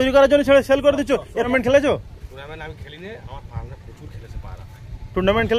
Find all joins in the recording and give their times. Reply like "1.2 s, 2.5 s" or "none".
1.5 s